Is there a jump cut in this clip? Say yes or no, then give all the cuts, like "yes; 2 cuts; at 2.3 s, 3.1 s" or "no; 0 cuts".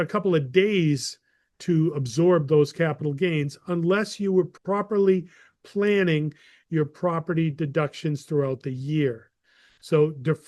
yes; 1 cut; at 4.5 s